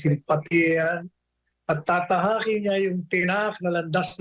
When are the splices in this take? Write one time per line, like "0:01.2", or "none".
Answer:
none